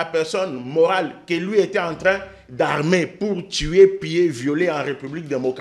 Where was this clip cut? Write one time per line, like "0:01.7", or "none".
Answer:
none